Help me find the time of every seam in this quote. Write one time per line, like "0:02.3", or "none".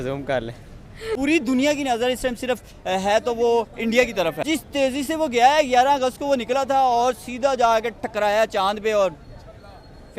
0:01.2
0:04.4